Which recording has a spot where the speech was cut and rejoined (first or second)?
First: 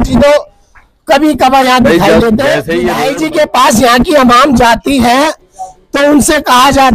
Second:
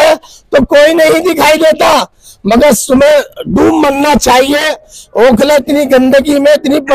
first